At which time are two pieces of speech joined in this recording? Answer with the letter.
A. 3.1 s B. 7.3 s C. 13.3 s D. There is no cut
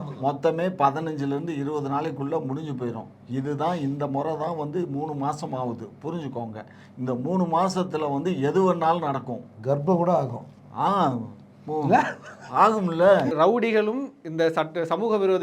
C